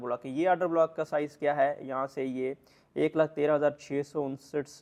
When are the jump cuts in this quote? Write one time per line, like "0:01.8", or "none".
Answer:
none